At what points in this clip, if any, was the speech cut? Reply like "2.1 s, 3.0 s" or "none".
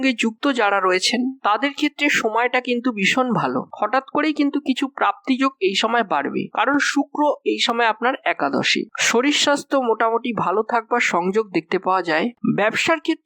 8.9 s, 12.4 s